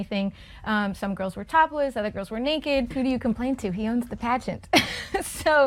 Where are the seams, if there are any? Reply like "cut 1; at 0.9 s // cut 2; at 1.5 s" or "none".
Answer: cut 1; at 2.9 s